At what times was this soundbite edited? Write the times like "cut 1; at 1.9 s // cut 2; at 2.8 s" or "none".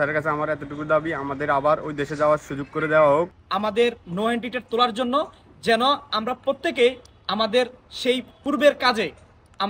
cut 1; at 3.4 s // cut 2; at 8.3 s